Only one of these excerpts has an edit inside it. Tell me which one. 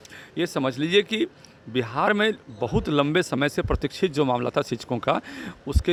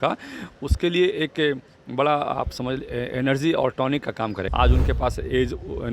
second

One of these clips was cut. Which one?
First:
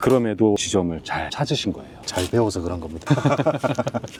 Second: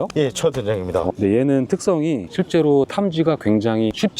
second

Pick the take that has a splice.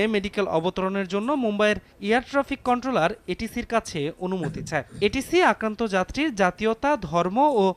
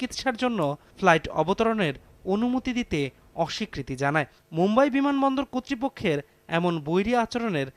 second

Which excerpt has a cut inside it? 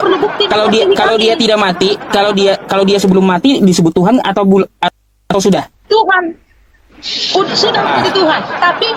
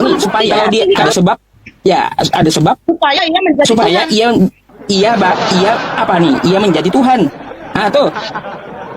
second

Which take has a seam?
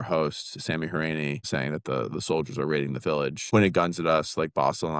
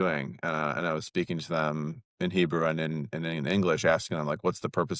first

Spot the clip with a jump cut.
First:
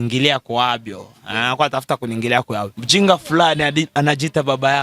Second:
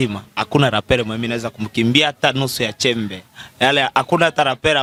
first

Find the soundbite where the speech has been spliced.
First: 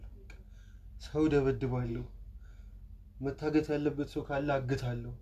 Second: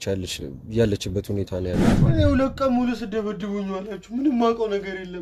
second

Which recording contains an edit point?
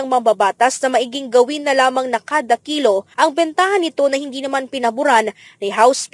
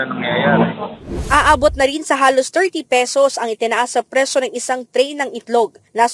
second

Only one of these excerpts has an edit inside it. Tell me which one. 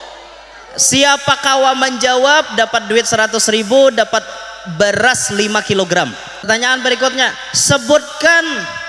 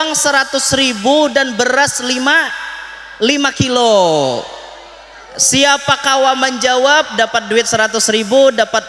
first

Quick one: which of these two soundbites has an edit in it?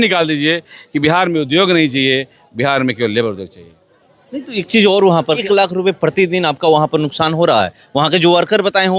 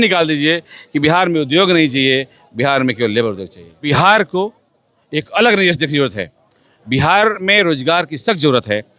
second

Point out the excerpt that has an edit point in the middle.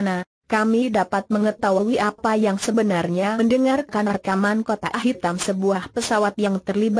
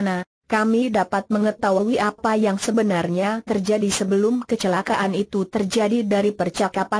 second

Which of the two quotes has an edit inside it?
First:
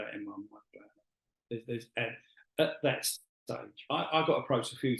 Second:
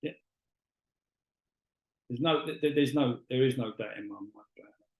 first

